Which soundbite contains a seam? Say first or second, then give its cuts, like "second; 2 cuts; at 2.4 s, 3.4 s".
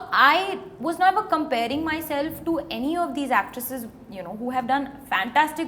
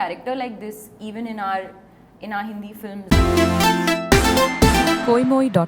second; 1 cut; at 3.0 s